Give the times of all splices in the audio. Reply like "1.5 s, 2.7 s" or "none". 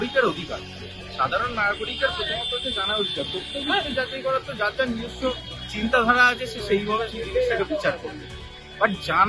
none